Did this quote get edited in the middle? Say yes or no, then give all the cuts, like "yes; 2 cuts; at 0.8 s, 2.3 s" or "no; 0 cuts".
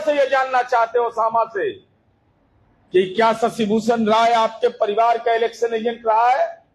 no; 0 cuts